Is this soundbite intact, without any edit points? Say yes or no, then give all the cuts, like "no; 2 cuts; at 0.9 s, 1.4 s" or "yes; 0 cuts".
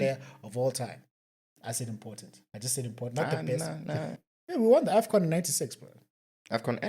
no; 1 cut; at 4.1 s